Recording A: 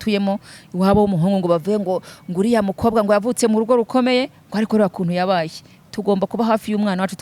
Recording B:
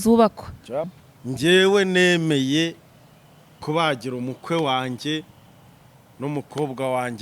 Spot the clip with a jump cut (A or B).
B